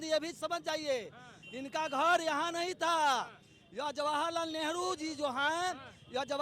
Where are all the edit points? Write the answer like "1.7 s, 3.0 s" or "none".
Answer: none